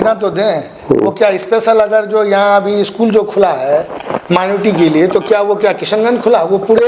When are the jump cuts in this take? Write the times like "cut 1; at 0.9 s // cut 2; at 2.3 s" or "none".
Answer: none

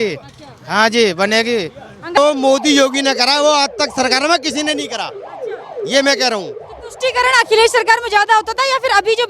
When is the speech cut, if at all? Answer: cut 1; at 2.2 s

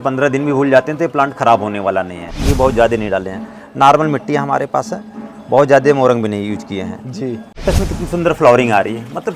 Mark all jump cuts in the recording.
cut 1; at 2.4 s // cut 2; at 7.6 s

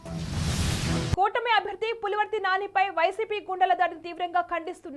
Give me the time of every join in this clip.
cut 1; at 1.1 s

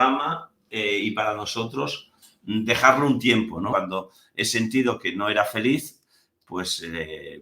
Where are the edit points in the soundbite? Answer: cut 1; at 3.7 s

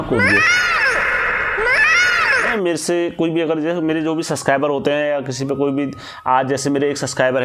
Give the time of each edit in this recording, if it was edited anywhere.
cut 1; at 2.5 s

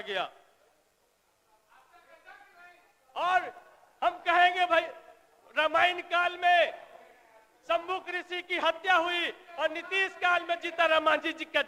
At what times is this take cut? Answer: none

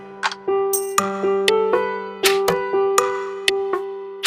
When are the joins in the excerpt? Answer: none

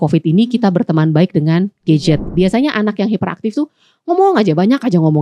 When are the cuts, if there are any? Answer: cut 1; at 2.2 s

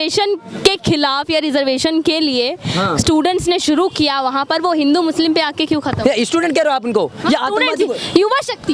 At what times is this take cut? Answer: none

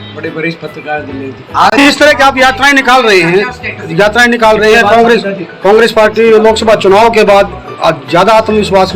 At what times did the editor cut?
cut 1; at 1.8 s

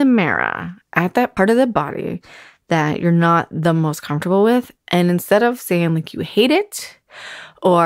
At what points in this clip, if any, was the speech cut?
cut 1; at 1.3 s

